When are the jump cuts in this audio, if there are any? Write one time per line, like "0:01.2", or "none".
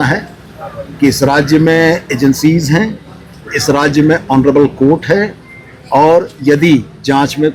none